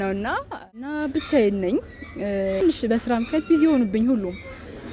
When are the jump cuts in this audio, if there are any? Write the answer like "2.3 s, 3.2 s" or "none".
0.9 s, 2.6 s